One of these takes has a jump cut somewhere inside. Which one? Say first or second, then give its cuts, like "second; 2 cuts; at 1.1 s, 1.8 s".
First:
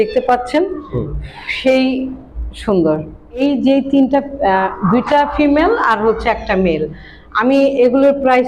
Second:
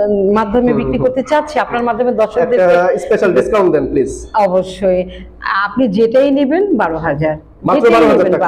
first; 1 cut; at 3.4 s